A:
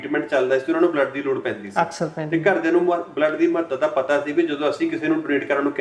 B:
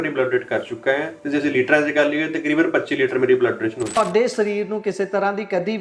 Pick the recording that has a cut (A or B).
B